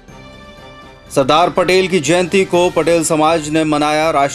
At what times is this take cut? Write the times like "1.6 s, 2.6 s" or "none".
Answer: 1.0 s